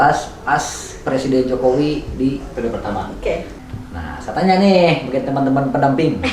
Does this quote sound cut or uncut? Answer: cut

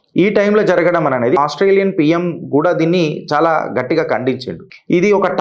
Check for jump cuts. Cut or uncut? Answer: cut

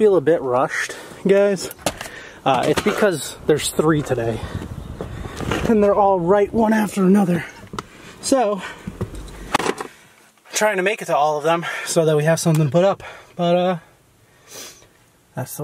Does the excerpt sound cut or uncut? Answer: uncut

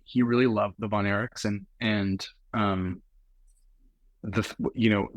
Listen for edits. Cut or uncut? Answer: uncut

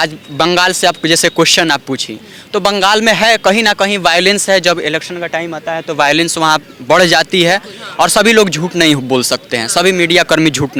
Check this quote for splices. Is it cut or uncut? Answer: uncut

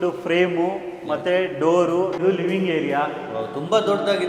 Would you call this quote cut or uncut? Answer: cut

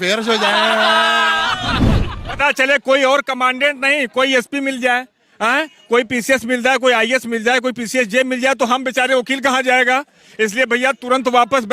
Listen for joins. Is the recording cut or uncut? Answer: uncut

